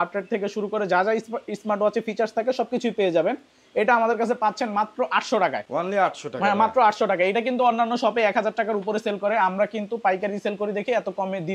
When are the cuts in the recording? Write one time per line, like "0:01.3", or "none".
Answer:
none